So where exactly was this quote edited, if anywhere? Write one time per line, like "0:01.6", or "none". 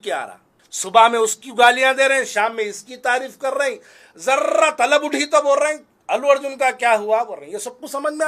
none

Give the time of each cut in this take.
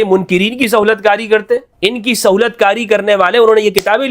0:01.7

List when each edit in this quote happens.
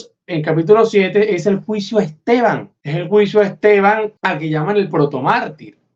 0:02.8
0:04.2

